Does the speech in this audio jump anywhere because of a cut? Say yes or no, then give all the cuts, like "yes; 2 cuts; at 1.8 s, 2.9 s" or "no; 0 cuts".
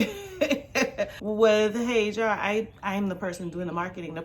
yes; 1 cut; at 1.2 s